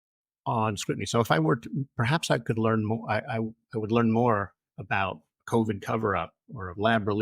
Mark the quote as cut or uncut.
uncut